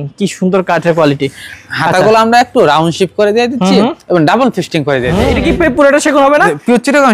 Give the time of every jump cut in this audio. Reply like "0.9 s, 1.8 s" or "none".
5.2 s

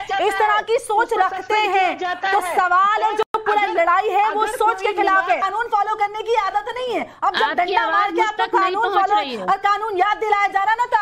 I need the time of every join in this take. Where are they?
5.4 s

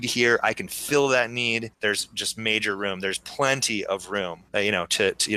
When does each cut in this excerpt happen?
4.4 s

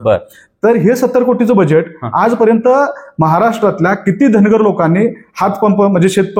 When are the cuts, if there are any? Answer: none

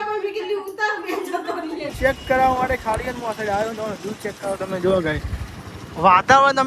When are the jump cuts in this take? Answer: 1.9 s

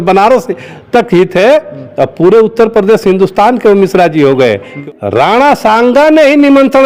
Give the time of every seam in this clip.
4.7 s

